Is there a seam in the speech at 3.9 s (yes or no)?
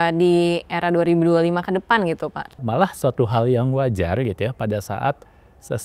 no